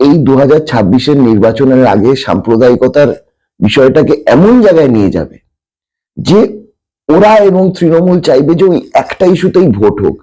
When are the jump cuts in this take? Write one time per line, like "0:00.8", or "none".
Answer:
none